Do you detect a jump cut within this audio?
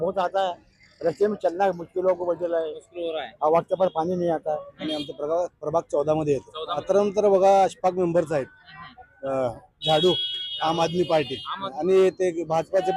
yes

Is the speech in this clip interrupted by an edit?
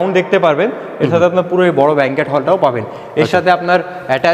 no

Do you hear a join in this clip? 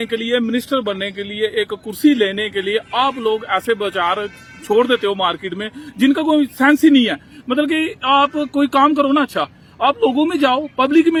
no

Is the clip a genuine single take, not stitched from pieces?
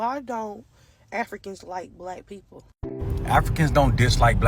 no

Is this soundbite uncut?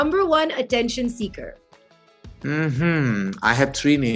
yes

